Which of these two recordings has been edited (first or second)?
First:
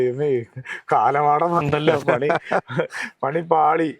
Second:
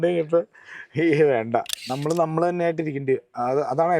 second